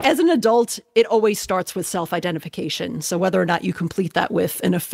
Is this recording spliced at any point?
no; 0 cuts

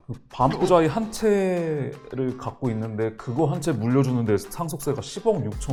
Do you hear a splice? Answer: no; 0 cuts

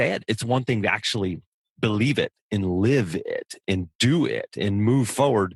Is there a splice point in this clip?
no; 0 cuts

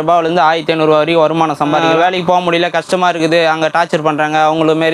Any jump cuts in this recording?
yes; 1 cut; at 1.8 s

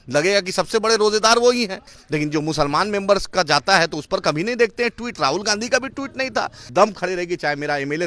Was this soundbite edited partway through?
yes; 2 cuts; at 1.9 s, 6.6 s

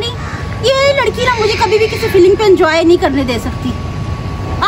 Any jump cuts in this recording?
yes; 1 cut; at 3.8 s

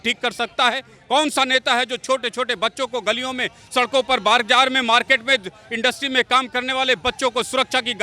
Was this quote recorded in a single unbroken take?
yes; 0 cuts

